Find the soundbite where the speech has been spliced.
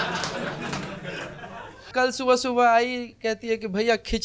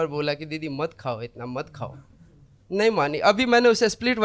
first; 1 cut; at 1.8 s

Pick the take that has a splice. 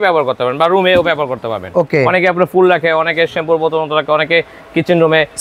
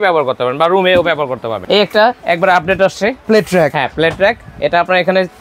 second; 2 cuts; at 1.5 s, 3.2 s

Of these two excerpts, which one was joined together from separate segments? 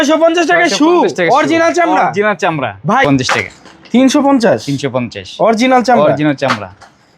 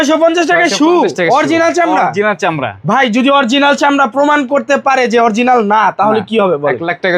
first; 1 cut; at 3.0 s

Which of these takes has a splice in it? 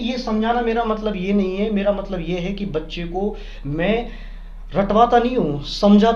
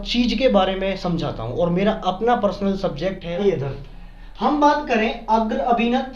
second; 1 cut; at 3.4 s

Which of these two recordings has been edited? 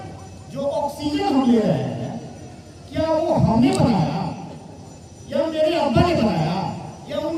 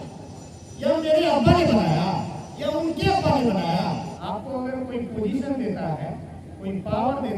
second; 1 cut; at 4.1 s

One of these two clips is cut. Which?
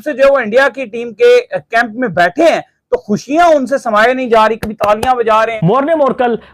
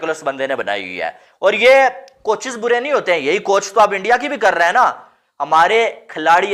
first; 1 cut; at 5.5 s

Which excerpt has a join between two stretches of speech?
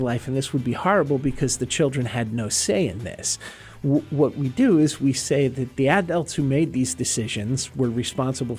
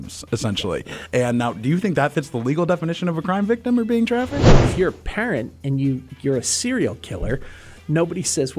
second; 1 cut; at 4.3 s

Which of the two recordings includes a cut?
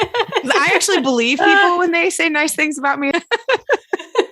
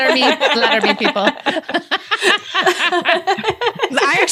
first; 1 cut; at 3.1 s

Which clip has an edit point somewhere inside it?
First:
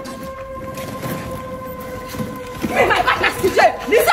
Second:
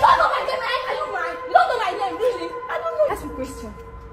second; 1 cut; at 3.1 s

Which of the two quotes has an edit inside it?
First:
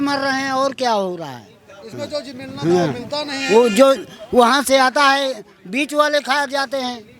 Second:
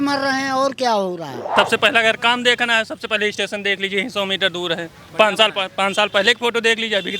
second; 1 cut; at 1.4 s

